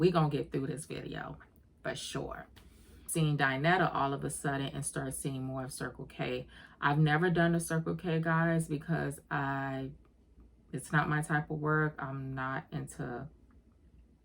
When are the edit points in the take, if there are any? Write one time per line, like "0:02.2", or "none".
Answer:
0:03.1